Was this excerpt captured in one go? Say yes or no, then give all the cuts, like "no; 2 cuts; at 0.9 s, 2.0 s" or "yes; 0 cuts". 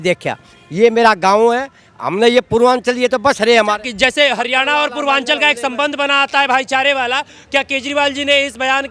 yes; 0 cuts